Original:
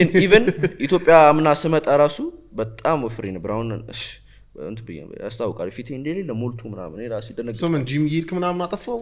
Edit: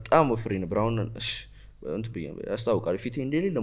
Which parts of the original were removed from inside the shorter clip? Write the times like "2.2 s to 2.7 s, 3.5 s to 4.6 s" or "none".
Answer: none